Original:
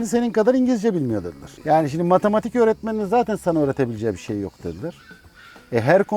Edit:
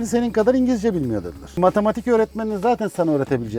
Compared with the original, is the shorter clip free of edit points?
no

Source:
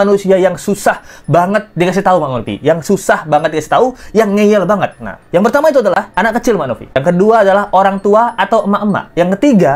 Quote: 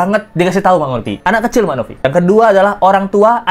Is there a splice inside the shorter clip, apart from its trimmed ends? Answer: yes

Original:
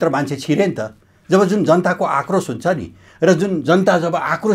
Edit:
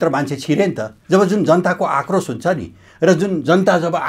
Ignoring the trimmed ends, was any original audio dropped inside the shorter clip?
yes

